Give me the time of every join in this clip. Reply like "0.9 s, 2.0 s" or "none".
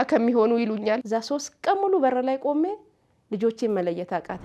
1.0 s

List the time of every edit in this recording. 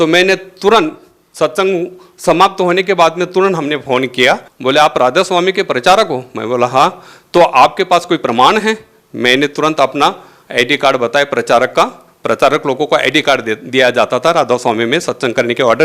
4.5 s

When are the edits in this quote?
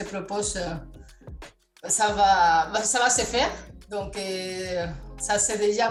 none

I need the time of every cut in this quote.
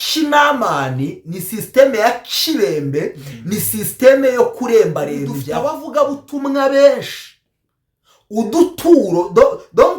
5.5 s

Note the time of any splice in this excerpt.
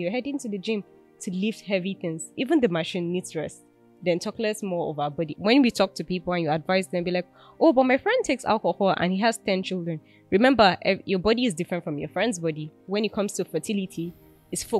2.3 s, 5.3 s, 12.8 s

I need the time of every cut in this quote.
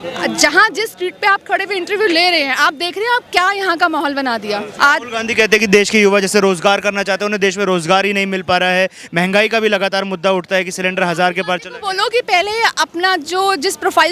4.7 s

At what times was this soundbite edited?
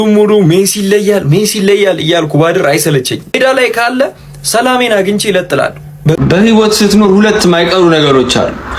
3.3 s, 6.2 s

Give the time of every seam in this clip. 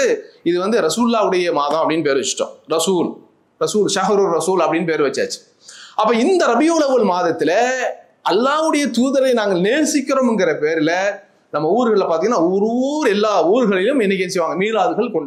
none

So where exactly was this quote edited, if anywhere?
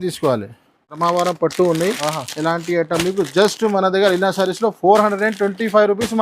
0.9 s

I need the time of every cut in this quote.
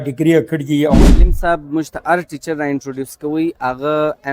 1.0 s

